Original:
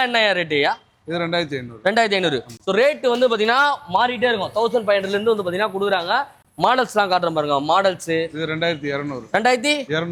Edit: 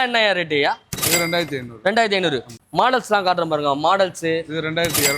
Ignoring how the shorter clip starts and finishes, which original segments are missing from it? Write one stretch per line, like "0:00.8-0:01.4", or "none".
0:02.5-0:06.4